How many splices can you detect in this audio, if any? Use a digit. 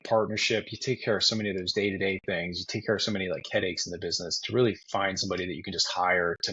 0